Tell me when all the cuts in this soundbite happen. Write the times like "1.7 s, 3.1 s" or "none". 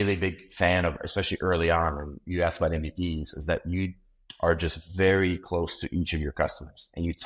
none